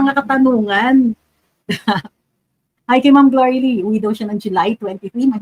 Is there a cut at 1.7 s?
no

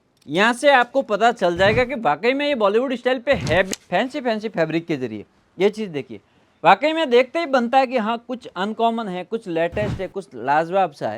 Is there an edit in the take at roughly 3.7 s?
yes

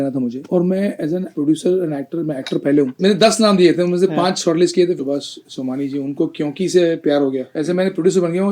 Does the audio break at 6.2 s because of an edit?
no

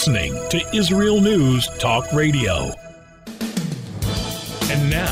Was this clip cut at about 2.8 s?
yes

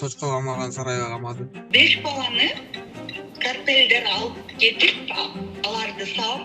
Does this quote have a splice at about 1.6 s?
yes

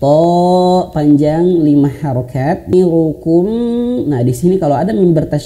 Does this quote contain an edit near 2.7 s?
yes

